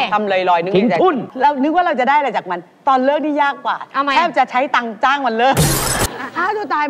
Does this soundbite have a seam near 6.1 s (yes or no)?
yes